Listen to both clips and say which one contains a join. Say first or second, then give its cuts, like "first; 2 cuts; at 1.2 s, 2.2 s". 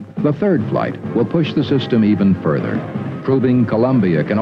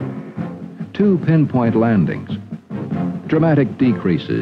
first; 1 cut; at 1.1 s